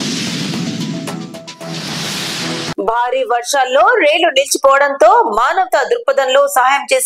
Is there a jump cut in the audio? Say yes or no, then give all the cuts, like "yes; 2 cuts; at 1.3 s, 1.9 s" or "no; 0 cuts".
yes; 1 cut; at 2.7 s